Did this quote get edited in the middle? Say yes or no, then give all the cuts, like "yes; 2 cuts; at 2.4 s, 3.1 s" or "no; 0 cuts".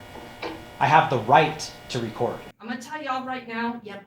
yes; 1 cut; at 2.5 s